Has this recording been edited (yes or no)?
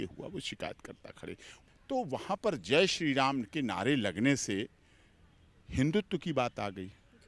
yes